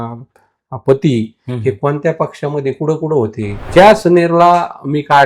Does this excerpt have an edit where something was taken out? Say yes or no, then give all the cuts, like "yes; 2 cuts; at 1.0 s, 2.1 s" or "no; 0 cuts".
yes; 1 cut; at 3.6 s